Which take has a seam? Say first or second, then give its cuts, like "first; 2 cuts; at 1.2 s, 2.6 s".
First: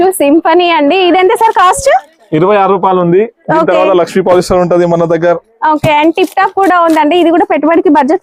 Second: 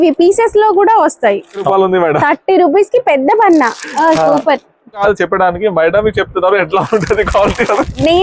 second; 2 cuts; at 1.7 s, 5.0 s